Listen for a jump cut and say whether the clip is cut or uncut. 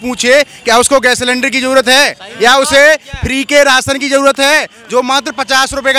uncut